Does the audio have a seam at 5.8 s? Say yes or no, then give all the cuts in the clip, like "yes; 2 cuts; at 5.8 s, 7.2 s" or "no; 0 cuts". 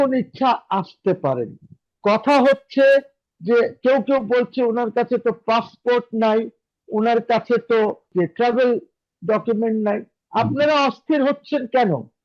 no; 1 cut; at 8.1 s